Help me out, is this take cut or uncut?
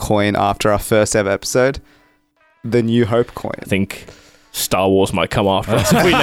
uncut